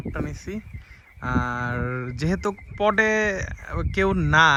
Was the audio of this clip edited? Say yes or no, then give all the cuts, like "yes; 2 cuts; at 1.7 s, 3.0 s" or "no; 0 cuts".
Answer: no; 0 cuts